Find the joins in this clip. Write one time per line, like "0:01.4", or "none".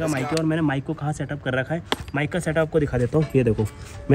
none